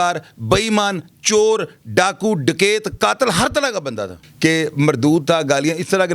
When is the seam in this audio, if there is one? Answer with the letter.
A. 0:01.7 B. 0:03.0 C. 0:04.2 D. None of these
C